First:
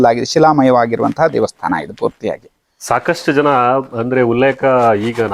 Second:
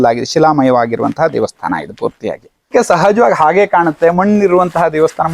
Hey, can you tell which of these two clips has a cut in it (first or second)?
second